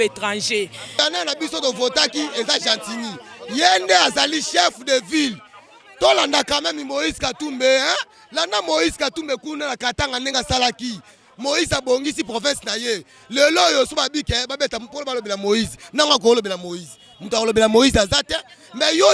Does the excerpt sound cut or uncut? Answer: cut